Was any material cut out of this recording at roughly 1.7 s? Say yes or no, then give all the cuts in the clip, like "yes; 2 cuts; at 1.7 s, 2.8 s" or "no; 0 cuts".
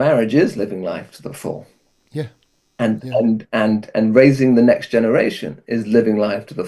no; 0 cuts